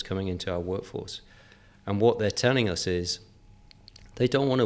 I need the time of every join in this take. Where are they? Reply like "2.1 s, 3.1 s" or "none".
none